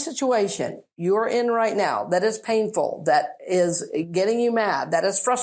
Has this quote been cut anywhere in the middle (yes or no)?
no